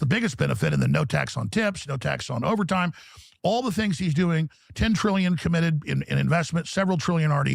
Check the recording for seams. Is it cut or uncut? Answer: uncut